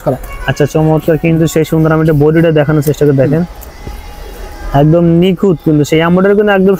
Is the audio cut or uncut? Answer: uncut